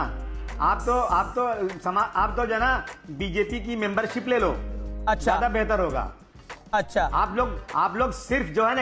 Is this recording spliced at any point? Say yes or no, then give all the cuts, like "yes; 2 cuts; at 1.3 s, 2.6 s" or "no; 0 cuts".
no; 0 cuts